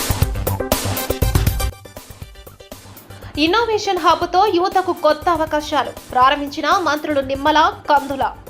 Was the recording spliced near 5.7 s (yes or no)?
no